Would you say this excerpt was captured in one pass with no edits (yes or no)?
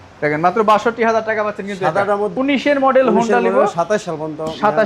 no